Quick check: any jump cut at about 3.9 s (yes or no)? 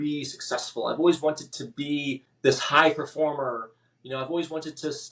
no